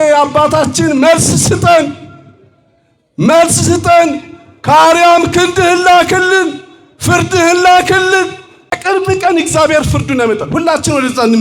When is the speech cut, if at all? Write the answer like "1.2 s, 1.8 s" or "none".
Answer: 8.8 s